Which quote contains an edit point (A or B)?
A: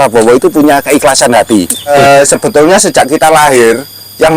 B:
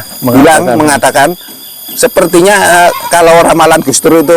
A